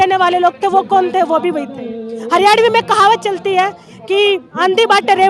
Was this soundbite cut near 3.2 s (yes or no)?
no